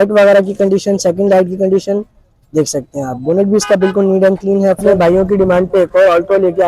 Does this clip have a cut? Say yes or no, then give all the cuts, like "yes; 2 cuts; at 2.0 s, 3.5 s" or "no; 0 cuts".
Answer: yes; 1 cut; at 4.9 s